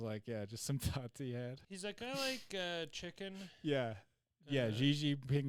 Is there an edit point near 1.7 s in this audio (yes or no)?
yes